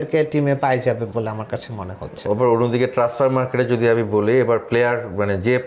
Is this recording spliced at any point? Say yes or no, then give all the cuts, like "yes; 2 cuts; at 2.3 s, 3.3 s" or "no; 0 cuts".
no; 0 cuts